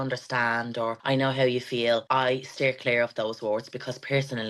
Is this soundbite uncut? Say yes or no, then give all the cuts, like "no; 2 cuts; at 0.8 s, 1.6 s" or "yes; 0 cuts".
no; 2 cuts; at 1.0 s, 2.0 s